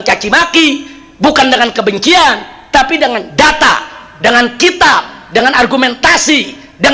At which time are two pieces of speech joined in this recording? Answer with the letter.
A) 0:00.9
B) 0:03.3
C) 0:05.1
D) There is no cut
D